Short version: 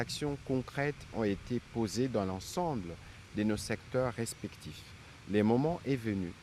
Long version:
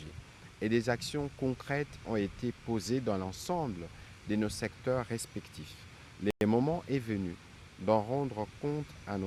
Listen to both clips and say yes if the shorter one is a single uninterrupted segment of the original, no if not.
no